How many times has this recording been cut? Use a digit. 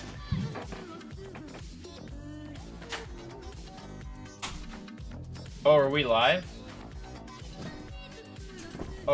1